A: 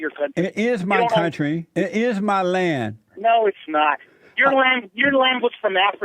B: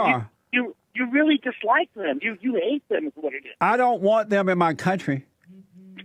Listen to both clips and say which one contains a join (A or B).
A